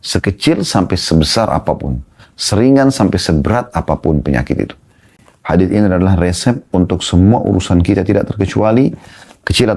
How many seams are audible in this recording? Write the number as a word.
one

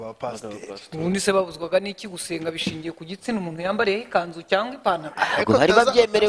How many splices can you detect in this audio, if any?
zero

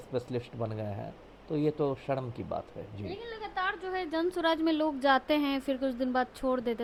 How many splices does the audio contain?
zero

